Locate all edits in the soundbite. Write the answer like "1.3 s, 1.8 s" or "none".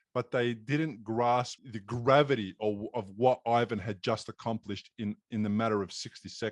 1.6 s